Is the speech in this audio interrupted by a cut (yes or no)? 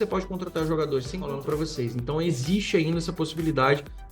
yes